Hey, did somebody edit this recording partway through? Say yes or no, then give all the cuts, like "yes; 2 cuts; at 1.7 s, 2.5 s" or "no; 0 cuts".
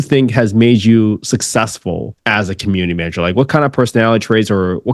yes; 1 cut; at 2.1 s